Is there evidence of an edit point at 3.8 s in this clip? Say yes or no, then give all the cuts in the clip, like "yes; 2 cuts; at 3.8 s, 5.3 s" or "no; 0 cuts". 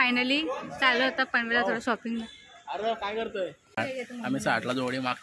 yes; 1 cut; at 3.8 s